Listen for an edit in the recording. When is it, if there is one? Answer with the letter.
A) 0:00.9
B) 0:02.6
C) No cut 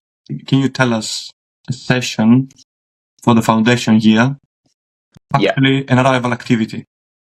C